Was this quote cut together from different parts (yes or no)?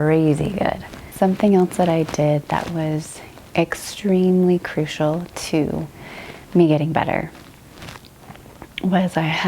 yes